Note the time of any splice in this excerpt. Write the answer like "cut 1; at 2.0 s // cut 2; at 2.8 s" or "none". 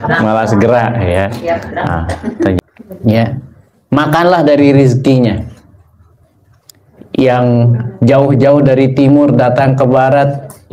cut 1; at 2.6 s